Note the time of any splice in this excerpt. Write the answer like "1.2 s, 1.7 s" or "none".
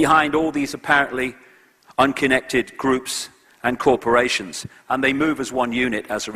2.6 s

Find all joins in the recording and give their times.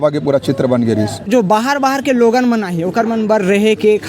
1.3 s

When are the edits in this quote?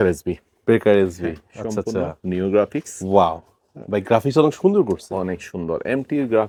none

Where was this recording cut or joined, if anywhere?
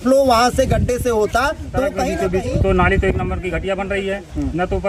2.1 s

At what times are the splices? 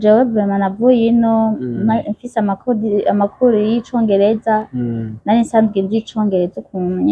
none

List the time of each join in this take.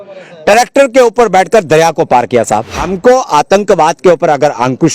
2.8 s

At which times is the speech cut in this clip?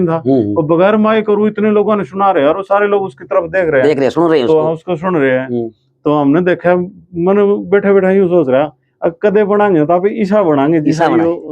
none

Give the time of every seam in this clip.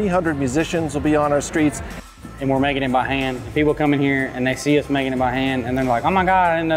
2.0 s

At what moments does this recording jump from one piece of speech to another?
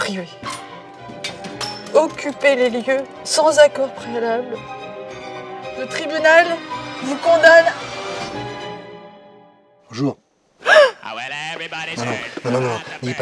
none

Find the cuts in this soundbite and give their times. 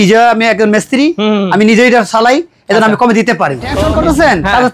3.7 s

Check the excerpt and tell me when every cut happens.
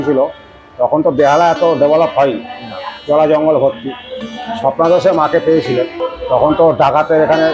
6.1 s

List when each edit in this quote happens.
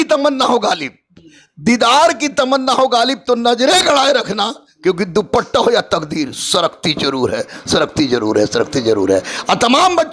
none

